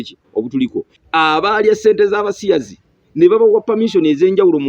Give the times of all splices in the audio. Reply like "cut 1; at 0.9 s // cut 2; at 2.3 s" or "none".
cut 1; at 1.0 s